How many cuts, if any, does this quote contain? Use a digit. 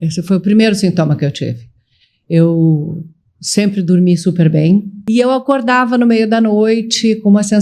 1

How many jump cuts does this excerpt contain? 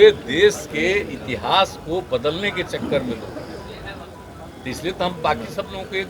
0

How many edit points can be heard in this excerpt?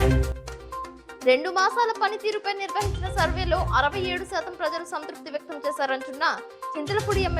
1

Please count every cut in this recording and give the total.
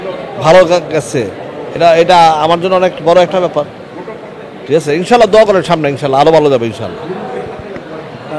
0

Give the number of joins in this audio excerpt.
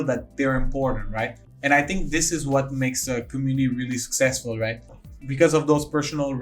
2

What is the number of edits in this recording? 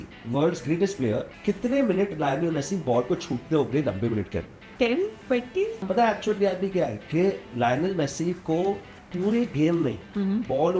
3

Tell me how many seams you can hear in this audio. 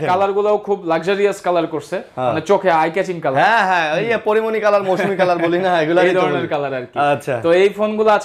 0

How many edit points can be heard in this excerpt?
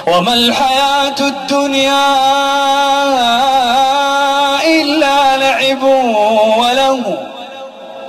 0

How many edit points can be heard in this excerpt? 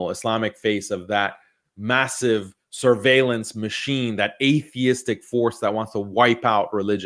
0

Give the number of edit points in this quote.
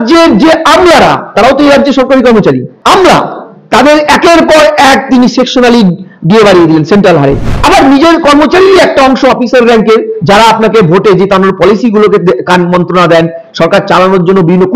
2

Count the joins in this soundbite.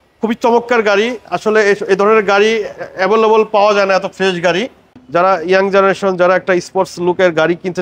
1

